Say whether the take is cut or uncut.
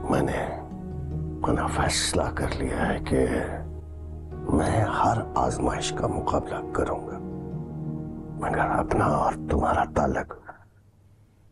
uncut